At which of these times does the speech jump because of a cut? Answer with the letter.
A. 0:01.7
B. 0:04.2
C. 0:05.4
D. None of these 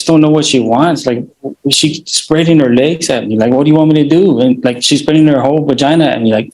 D